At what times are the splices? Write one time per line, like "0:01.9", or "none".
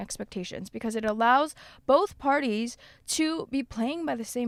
none